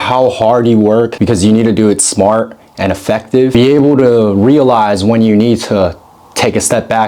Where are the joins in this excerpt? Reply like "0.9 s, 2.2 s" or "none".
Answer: 1.1 s, 3.5 s